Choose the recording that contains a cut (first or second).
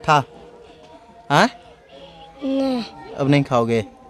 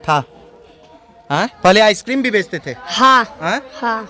second